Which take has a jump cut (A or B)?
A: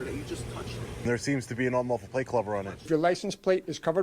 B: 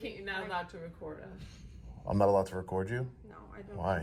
A